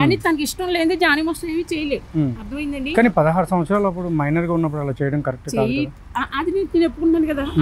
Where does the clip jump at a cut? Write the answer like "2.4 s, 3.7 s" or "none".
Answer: none